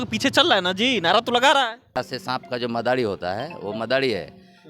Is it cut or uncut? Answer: cut